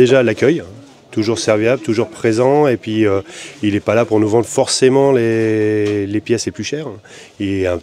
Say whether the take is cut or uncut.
uncut